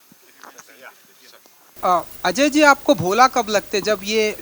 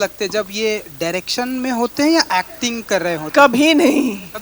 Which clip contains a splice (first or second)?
first